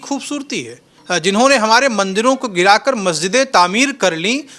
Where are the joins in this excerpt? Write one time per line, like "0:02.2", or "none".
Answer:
0:01.0